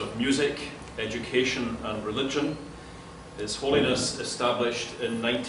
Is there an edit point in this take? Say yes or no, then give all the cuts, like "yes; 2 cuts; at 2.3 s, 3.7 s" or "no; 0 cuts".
no; 0 cuts